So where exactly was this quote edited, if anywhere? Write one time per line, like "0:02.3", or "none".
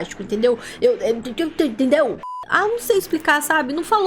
0:02.3